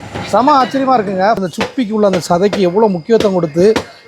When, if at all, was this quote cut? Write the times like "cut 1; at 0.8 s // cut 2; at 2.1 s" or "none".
cut 1; at 1.4 s

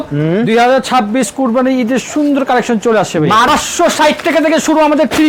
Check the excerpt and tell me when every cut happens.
cut 1; at 3.5 s

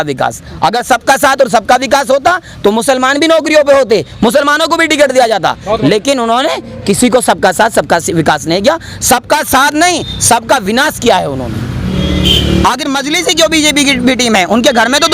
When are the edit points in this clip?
cut 1; at 11.9 s

